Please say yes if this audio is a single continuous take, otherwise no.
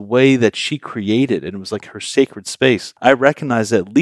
no